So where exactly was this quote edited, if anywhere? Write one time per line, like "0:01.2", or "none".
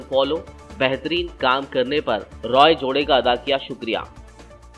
none